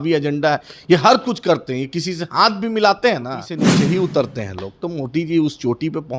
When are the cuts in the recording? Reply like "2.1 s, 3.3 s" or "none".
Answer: 3.7 s